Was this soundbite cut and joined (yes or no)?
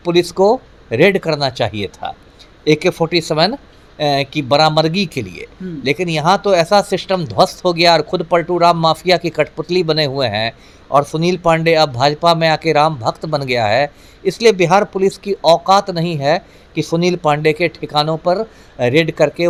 no